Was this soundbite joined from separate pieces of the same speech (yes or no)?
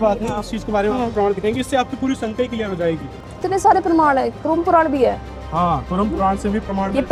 no